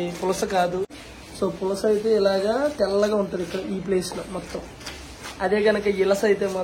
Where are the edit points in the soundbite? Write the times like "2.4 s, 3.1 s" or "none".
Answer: 0.9 s